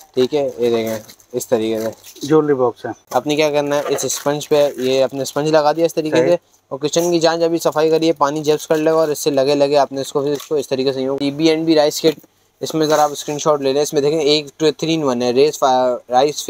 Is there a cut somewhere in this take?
yes; 2 cuts; at 2.9 s, 11.2 s

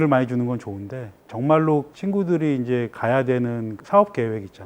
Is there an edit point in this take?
yes; 1 cut; at 3.7 s

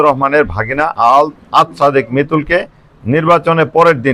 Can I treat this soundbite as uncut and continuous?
yes; 0 cuts

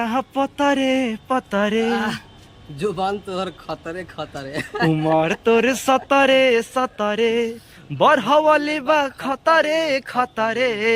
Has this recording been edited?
no; 0 cuts

